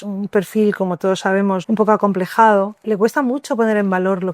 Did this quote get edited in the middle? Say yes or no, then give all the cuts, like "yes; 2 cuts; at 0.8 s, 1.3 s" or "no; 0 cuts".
yes; 2 cuts; at 1.6 s, 2.8 s